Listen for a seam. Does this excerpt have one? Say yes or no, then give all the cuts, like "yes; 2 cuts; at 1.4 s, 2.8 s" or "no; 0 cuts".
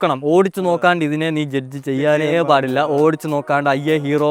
no; 0 cuts